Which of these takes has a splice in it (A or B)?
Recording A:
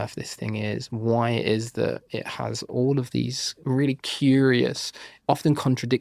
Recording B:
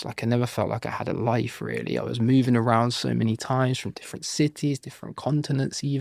A